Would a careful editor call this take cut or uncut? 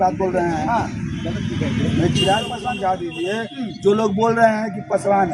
cut